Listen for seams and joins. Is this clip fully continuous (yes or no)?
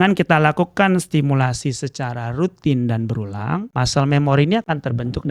no